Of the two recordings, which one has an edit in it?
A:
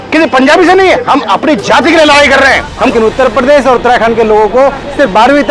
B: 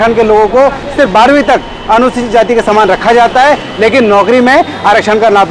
A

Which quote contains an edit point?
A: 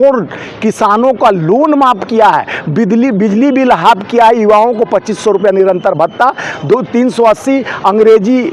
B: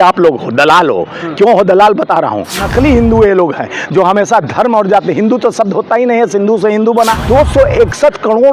B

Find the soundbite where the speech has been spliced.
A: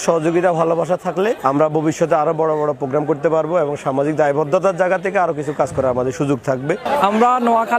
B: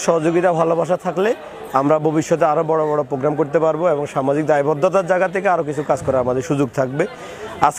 A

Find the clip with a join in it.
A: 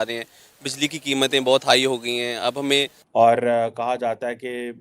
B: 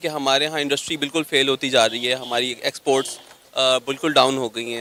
A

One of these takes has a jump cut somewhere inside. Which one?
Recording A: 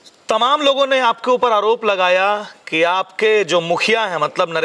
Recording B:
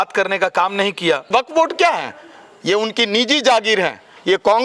B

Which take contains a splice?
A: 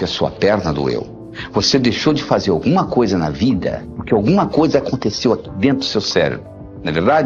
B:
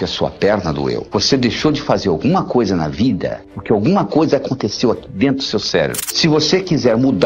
B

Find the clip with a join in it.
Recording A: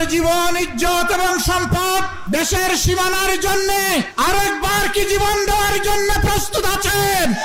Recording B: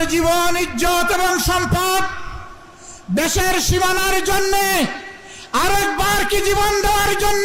A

